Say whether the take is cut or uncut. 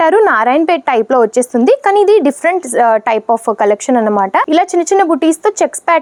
uncut